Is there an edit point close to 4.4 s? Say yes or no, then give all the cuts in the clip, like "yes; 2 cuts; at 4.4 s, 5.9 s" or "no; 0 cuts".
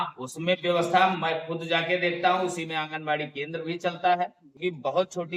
yes; 1 cut; at 4.4 s